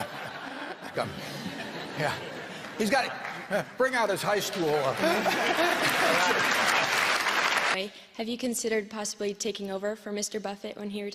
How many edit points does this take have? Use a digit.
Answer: 2